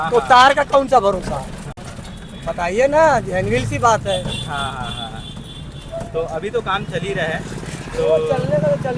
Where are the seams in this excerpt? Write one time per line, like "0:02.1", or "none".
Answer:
none

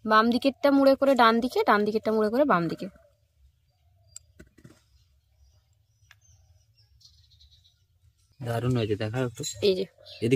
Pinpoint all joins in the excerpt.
0:08.2

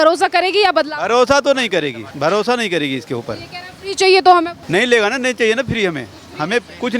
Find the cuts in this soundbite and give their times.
0:02.0
0:04.6

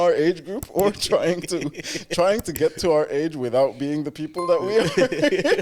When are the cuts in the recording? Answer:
none

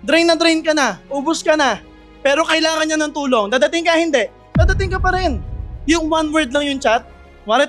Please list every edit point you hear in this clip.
0:05.7

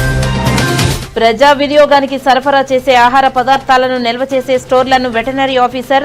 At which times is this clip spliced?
0:01.0

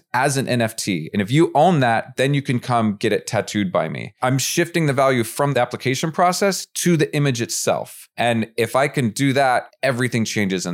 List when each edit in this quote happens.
0:01.1
0:04.1
0:05.5
0:08.0
0:09.7

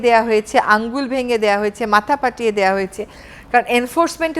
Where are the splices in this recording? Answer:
none

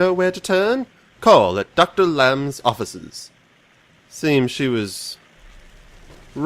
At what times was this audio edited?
0:02.4

